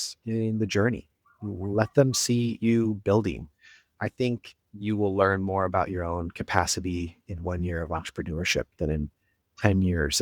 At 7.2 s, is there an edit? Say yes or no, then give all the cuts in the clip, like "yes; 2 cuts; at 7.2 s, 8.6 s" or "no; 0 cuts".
no; 1 cut; at 3.9 s